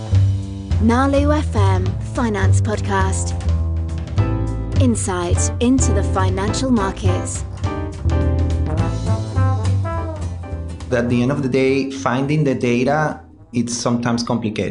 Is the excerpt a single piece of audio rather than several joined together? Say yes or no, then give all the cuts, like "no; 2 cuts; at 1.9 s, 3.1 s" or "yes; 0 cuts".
no; 2 cuts; at 10.9 s, 13.5 s